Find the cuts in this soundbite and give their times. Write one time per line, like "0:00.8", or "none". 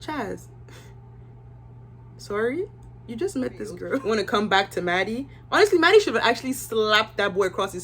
0:03.9